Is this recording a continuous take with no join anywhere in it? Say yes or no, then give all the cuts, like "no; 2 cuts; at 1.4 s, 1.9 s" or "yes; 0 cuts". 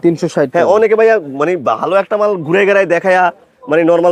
yes; 0 cuts